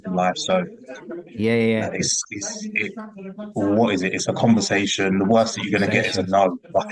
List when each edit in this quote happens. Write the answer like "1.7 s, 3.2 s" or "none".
none